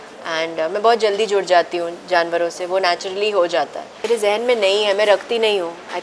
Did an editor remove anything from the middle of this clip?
yes; 1 cut; at 3.9 s

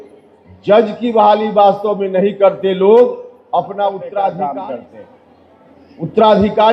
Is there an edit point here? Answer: yes; 1 cut; at 4.1 s

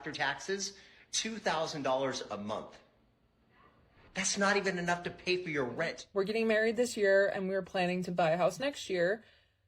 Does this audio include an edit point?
yes; 1 cut; at 6.0 s

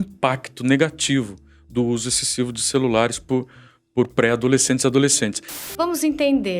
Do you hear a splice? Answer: yes; 1 cut; at 5.5 s

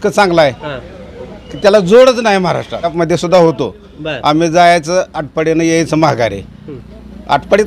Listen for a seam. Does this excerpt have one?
yes; 1 cut; at 2.9 s

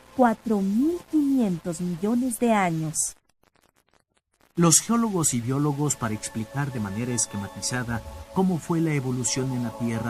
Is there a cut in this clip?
yes; 1 cut; at 4.8 s

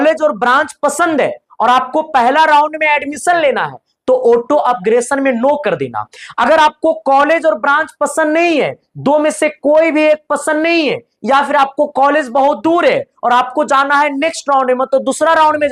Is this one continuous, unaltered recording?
yes; 0 cuts

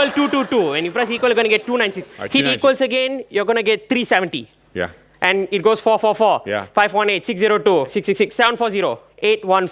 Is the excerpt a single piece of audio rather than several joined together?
yes; 0 cuts

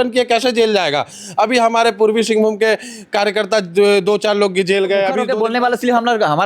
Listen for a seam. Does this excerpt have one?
yes; 1 cut; at 5.2 s

